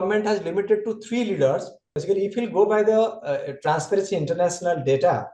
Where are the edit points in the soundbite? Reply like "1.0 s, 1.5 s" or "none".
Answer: 1.9 s

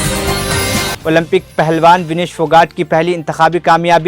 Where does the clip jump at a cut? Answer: 0.9 s

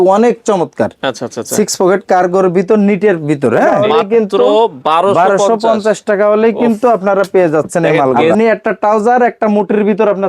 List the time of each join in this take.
3.8 s, 8.3 s

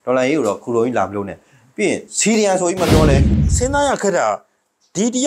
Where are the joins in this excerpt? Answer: 3.4 s

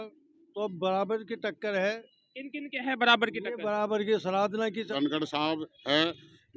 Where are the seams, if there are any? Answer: 4.8 s

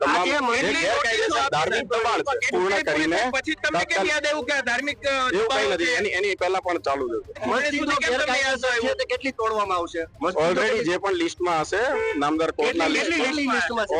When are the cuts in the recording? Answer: 2.5 s, 7.4 s

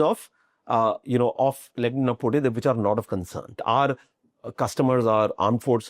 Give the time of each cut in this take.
3.6 s

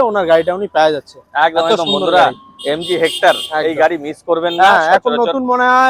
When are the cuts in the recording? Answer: none

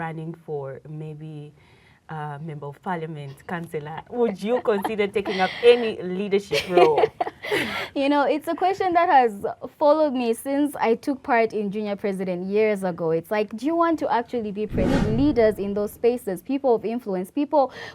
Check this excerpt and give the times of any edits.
14.8 s

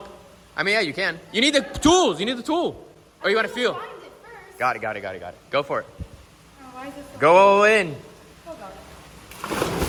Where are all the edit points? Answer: none

